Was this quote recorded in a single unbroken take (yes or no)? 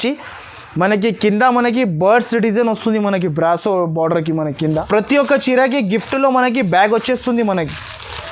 no